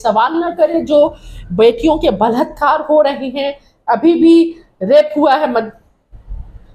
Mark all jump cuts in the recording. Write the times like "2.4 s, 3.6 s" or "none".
none